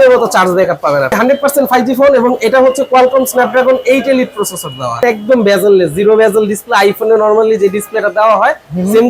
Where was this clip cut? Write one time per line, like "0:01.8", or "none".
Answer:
0:01.2
0:05.0